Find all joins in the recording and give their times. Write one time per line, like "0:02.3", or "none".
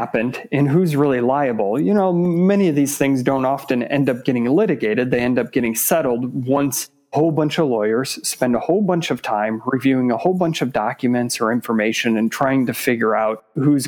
none